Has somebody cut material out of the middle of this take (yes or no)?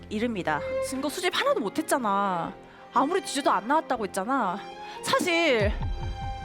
yes